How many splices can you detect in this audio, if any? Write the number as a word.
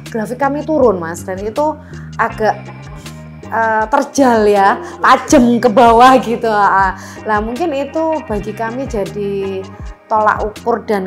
zero